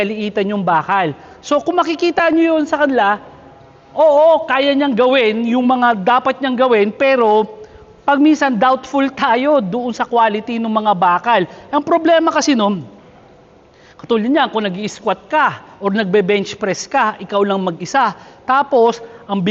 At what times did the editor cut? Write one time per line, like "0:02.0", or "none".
none